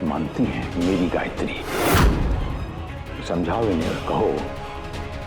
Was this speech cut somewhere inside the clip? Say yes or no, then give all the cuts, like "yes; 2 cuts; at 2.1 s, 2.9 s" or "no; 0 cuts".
no; 0 cuts